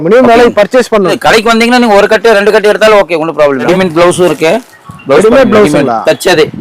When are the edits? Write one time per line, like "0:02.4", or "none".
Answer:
0:01.1
0:03.7